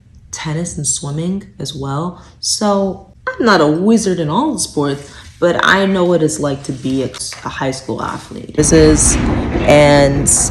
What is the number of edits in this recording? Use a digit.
2